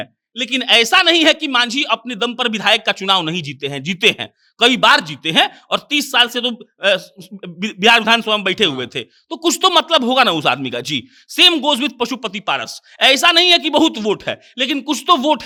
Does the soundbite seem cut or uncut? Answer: uncut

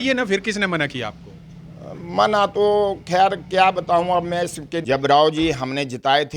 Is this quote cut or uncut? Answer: cut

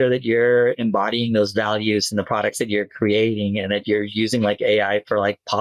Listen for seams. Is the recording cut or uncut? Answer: uncut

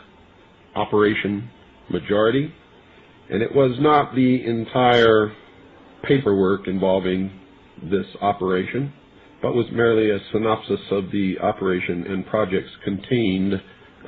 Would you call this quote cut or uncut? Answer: cut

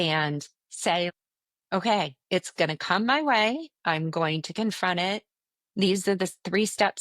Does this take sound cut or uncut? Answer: cut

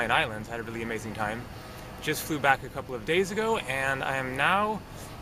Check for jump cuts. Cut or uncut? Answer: uncut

